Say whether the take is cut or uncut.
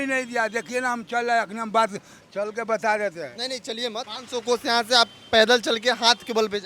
cut